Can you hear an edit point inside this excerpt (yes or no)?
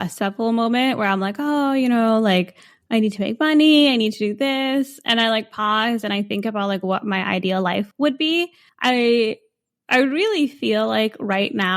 yes